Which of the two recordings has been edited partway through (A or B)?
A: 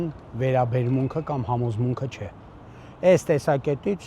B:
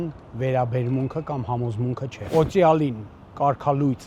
B